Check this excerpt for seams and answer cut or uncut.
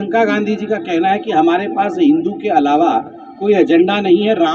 uncut